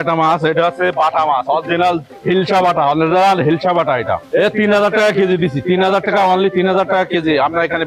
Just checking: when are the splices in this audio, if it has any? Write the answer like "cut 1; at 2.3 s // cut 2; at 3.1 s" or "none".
cut 1; at 2.1 s // cut 2; at 4.2 s